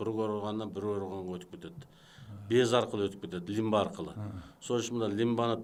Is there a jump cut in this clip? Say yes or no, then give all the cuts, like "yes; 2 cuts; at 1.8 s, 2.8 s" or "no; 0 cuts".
no; 0 cuts